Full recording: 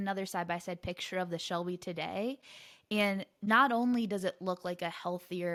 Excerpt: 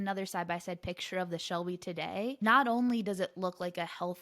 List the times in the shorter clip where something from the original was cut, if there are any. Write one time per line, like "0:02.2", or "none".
0:02.4